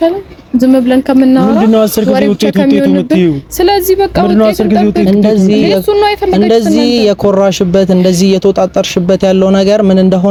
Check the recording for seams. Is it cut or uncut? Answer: uncut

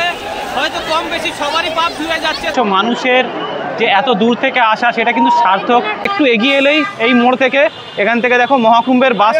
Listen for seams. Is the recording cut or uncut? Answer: cut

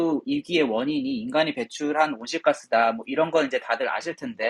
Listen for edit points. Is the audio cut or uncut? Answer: uncut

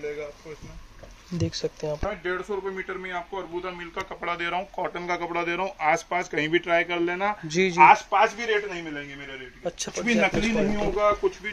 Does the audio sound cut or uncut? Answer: cut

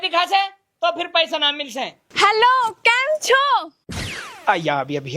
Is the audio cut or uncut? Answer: cut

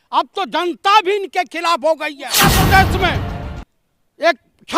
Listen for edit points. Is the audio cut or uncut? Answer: cut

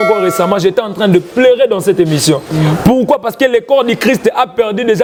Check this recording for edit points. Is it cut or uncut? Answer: uncut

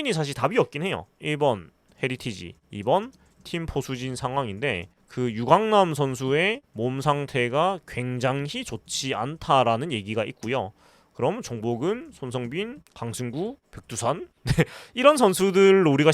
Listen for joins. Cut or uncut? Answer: cut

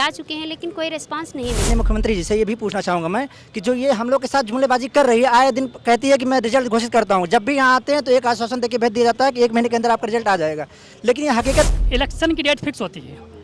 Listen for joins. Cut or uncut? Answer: cut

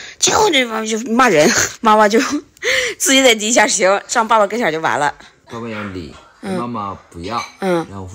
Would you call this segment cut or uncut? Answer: cut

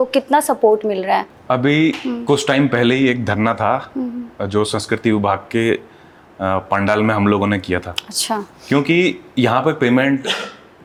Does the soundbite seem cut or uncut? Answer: uncut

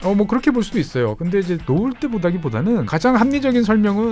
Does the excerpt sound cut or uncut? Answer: cut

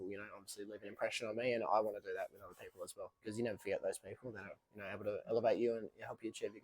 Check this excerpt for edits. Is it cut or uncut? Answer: cut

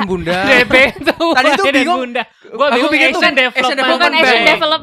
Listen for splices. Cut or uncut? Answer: uncut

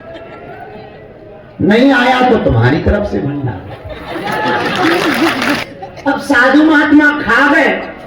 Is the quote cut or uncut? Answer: cut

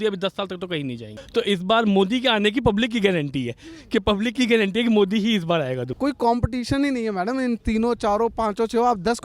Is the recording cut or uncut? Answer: cut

